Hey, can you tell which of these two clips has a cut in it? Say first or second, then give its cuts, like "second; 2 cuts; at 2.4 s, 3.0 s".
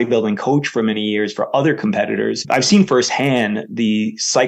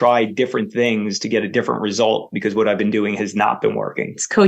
first; 1 cut; at 2.4 s